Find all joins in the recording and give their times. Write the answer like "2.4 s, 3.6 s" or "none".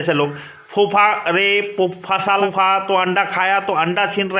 2.4 s